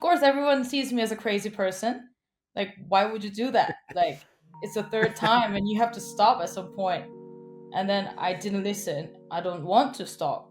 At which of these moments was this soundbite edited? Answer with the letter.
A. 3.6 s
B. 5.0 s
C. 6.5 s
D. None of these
D